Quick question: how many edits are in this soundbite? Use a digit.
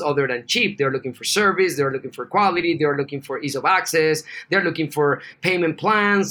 1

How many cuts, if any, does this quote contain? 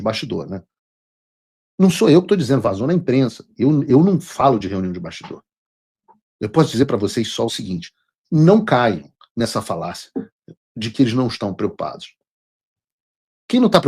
0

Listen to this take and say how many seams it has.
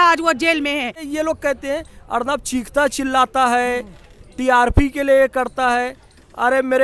1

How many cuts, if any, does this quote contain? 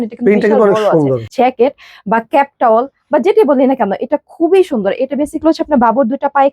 1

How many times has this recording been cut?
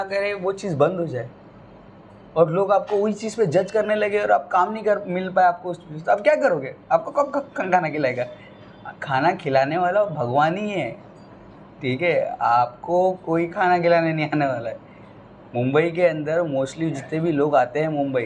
0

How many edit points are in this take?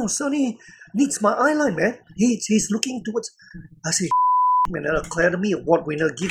0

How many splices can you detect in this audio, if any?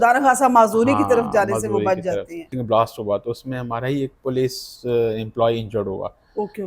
2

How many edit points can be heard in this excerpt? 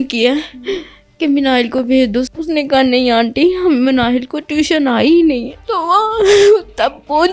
2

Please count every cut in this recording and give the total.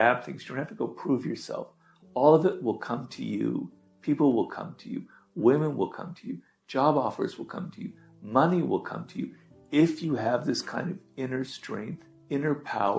1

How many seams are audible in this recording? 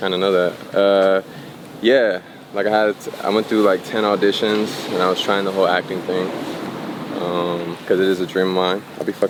0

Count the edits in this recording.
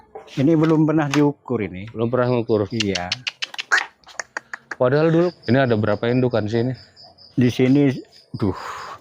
1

